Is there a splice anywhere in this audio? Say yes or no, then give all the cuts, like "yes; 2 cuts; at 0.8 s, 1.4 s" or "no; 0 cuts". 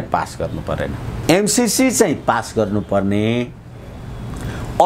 yes; 1 cut; at 1.1 s